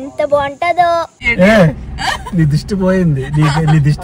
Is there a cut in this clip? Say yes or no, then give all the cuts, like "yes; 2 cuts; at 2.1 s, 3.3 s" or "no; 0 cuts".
no; 0 cuts